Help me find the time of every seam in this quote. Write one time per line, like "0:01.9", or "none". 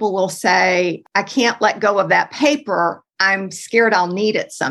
0:01.0